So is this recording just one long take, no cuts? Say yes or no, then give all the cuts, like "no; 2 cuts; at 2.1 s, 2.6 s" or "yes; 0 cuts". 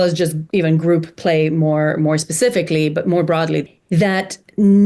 no; 1 cut; at 3.6 s